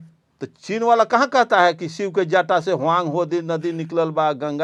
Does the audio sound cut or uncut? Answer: uncut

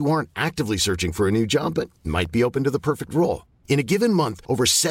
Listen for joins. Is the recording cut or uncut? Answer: uncut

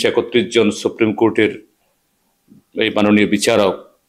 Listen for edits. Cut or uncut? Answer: uncut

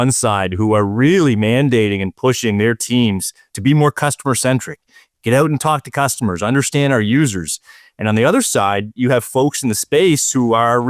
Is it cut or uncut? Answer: uncut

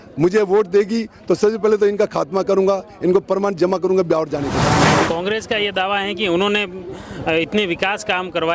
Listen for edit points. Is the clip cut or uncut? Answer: cut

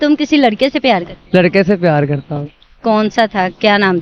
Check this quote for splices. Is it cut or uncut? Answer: uncut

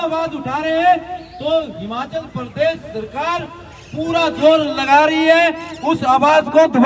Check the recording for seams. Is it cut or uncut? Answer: uncut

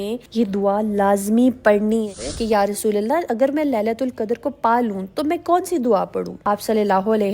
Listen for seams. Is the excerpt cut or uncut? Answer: cut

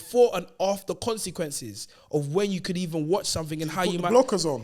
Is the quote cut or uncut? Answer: uncut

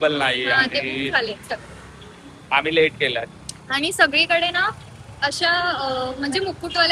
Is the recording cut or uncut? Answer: uncut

